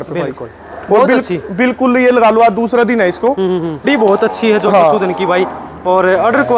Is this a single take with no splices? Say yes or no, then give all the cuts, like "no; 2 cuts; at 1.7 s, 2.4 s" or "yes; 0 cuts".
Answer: no; 1 cut; at 3.9 s